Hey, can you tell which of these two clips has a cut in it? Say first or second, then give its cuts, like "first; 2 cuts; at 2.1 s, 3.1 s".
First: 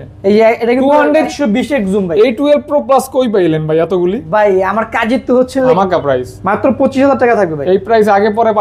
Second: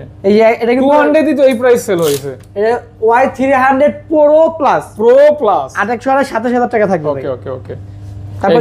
first; 2 cuts; at 1.3 s, 5.8 s